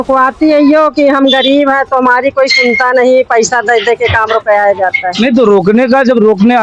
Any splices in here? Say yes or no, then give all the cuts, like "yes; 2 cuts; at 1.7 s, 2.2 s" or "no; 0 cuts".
no; 0 cuts